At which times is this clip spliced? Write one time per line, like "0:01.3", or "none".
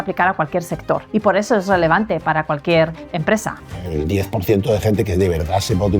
0:01.0
0:03.5

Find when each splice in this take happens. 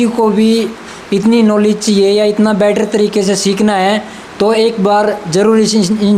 none

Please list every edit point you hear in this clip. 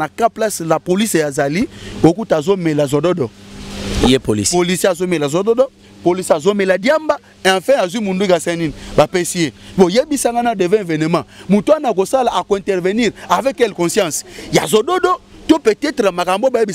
none

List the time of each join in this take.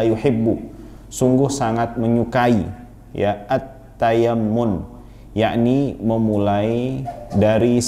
none

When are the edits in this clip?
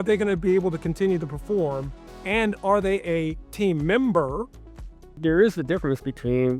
0:05.2

